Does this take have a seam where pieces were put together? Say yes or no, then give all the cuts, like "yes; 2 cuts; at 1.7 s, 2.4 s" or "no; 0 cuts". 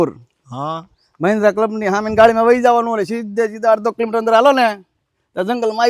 no; 0 cuts